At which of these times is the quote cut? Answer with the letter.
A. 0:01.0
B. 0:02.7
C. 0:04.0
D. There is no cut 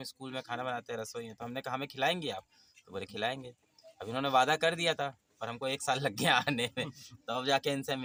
D